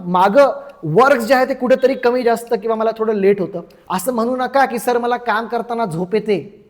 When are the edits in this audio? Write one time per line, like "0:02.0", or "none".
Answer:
0:03.7